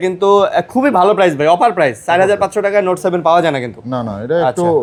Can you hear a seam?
no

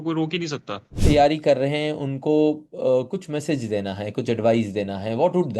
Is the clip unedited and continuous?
no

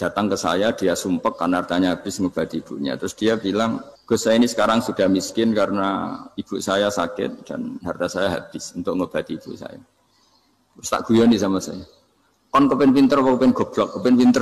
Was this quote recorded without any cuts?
no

